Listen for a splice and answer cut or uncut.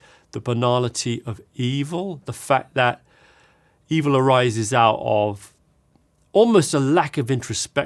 uncut